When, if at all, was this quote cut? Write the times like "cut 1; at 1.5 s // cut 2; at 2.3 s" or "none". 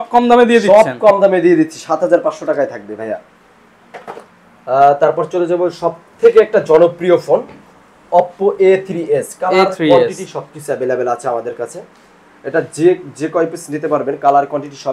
none